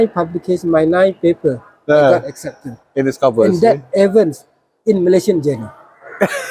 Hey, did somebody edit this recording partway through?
no; 0 cuts

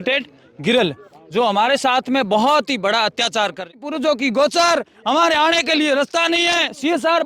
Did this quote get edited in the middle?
yes; 1 cut; at 3.8 s

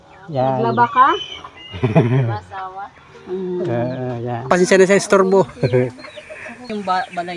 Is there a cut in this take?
yes; 2 cuts; at 4.5 s, 6.5 s

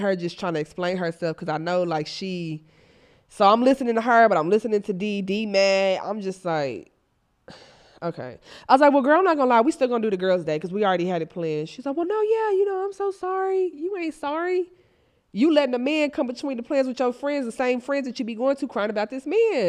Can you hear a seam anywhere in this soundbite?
yes; 1 cut; at 17.0 s

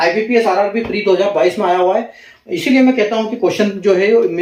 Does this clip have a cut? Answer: no; 0 cuts

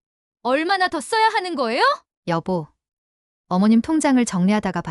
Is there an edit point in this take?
yes; 1 cut; at 2.1 s

